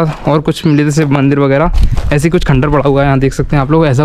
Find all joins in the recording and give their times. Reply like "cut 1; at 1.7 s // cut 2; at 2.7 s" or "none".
none